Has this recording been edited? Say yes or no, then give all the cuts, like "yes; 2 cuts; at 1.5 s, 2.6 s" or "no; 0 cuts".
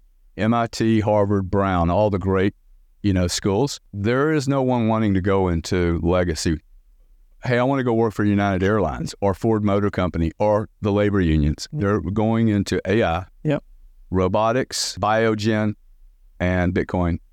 yes; 2 cuts; at 3.9 s, 15.0 s